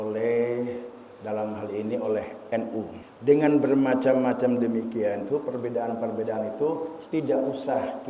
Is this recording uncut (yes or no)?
no